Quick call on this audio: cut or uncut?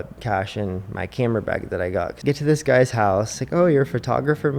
cut